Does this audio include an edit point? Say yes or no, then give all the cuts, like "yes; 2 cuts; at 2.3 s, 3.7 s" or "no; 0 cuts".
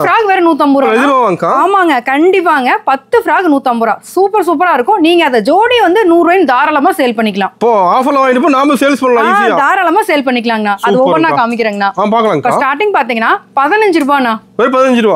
no; 0 cuts